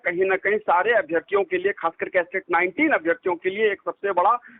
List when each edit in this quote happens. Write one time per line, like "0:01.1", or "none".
none

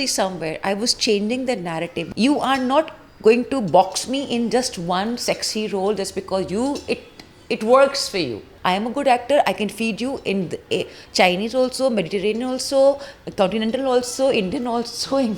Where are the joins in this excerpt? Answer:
0:02.0
0:08.4

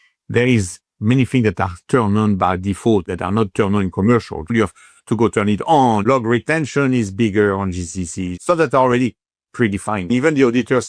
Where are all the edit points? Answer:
0:03.1
0:04.5
0:06.0
0:08.2
0:10.1

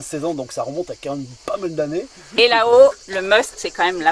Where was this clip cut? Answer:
0:02.3

